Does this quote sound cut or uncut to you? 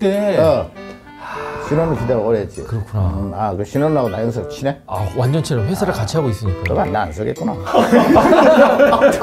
uncut